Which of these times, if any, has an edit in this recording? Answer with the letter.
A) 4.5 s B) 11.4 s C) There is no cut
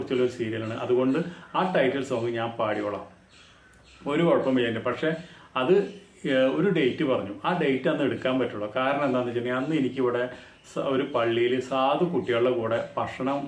C